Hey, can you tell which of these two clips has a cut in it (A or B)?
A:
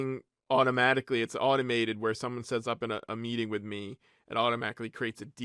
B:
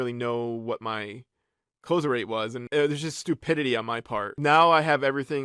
B